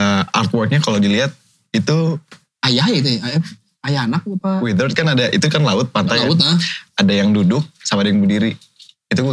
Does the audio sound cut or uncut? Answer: uncut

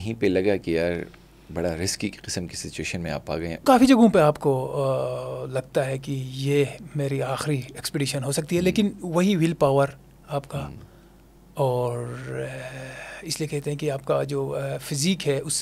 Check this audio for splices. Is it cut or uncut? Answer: cut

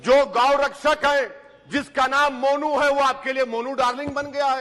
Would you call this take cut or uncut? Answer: uncut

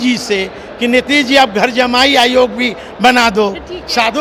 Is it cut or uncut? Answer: uncut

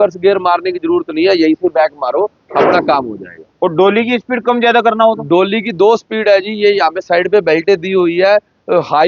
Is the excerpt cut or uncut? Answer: uncut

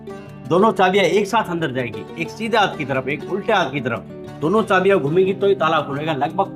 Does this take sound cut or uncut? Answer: uncut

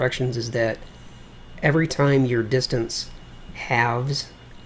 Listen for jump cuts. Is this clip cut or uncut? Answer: uncut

